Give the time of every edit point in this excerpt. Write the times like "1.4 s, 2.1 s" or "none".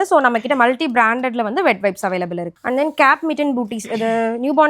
2.5 s